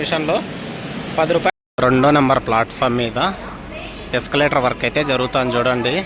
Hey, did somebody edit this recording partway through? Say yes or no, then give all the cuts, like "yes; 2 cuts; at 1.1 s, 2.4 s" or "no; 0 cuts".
yes; 1 cut; at 1.5 s